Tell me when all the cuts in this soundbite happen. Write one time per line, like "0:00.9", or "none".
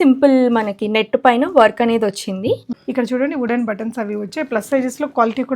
0:02.7